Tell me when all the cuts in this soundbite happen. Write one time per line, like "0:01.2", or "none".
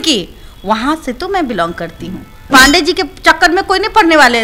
0:02.5

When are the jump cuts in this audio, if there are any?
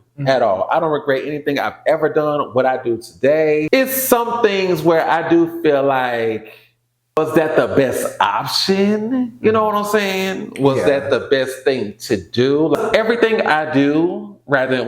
0:03.7
0:07.2
0:12.8

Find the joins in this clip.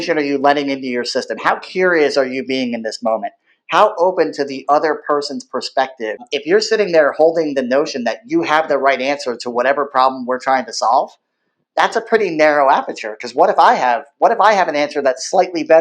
0:06.2

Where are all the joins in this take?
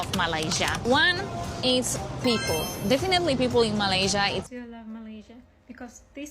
0:04.5

